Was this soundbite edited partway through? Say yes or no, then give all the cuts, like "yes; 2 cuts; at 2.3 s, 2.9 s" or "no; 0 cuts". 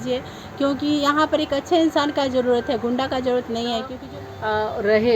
yes; 1 cut; at 4.0 s